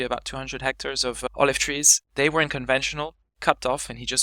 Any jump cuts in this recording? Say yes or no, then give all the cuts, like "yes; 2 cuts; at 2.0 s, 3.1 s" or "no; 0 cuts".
yes; 1 cut; at 1.3 s